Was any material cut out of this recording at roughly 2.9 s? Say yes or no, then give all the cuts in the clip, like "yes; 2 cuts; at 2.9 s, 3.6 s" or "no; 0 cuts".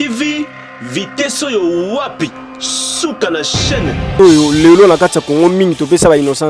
no; 1 cut; at 4.1 s